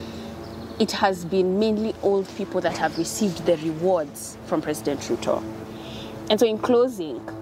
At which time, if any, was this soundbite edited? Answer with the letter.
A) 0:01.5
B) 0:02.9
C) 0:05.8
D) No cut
D